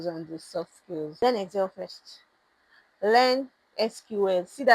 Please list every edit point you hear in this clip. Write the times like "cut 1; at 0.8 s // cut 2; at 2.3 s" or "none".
cut 1; at 1.2 s